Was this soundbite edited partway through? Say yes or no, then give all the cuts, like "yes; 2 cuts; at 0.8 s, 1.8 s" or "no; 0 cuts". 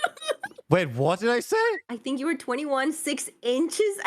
yes; 1 cut; at 1.9 s